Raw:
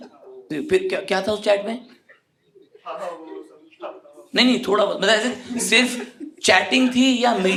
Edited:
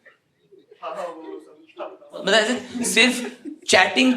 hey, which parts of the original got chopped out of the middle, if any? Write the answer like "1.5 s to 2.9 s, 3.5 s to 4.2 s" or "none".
4.2 s to 5.0 s

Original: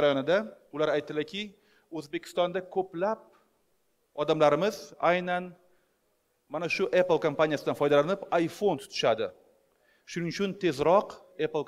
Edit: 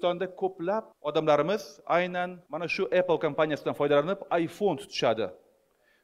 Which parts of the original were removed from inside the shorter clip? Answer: 3.3 s to 4.1 s, 5.6 s to 6.4 s

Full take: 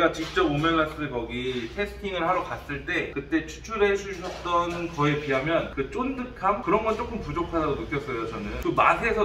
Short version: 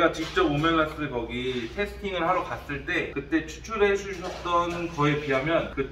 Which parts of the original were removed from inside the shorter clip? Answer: none

